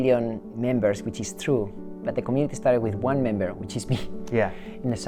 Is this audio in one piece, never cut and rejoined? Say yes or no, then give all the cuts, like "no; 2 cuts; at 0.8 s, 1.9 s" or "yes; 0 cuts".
yes; 0 cuts